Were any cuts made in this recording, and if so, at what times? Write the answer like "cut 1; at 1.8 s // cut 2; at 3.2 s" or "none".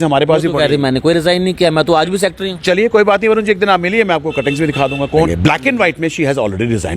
cut 1; at 5.3 s